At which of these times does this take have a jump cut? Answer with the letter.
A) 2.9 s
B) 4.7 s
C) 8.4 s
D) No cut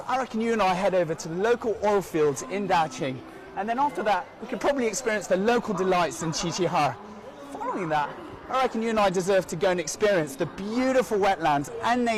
B